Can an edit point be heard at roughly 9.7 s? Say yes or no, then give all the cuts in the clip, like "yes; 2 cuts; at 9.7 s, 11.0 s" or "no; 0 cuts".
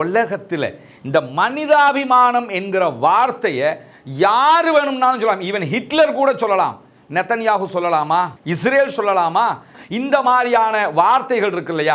yes; 1 cut; at 9.7 s